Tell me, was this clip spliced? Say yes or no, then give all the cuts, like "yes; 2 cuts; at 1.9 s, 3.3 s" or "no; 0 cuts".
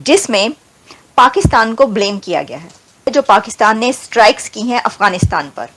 yes; 1 cut; at 3.1 s